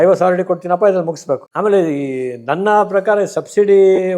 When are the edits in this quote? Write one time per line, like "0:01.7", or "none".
0:01.5